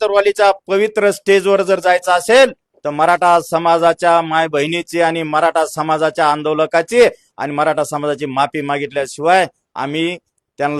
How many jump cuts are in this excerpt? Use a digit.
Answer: 0